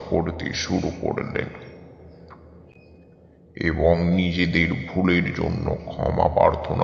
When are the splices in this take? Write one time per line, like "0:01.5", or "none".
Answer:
none

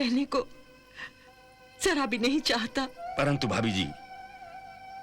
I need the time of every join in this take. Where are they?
0:03.0

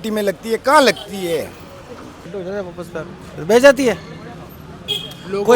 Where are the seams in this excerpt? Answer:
0:02.3

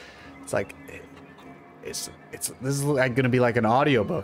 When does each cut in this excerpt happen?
none

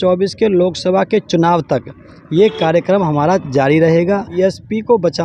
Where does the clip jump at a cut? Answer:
0:04.3

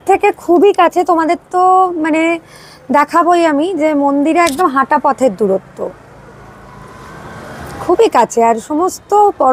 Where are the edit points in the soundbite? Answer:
none

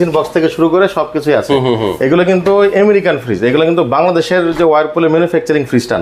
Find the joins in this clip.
none

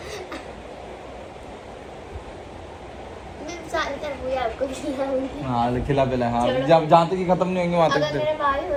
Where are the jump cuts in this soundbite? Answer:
none

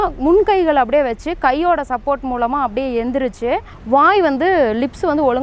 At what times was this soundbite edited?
0:03.7

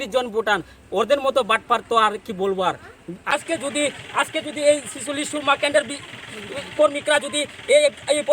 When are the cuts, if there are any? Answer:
0:03.2

